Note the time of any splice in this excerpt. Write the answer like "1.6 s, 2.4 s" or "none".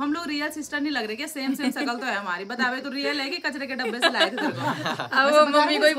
none